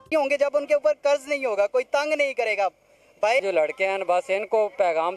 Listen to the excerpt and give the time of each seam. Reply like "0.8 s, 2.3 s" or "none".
3.4 s